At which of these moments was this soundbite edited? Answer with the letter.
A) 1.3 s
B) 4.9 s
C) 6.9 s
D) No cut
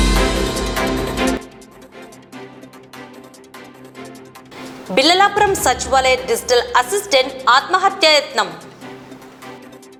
D